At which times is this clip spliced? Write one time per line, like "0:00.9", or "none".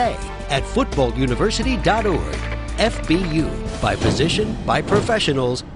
none